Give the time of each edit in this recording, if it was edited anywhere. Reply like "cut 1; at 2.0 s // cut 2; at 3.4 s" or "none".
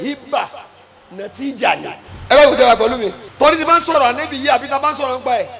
cut 1; at 2.1 s // cut 2; at 3.2 s